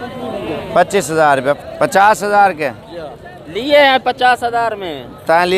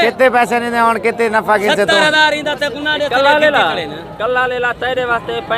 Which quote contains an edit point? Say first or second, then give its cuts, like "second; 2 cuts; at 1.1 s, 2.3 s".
first; 1 cut; at 1.6 s